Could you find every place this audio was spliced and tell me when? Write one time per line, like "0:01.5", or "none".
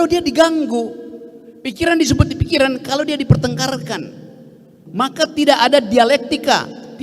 0:04.8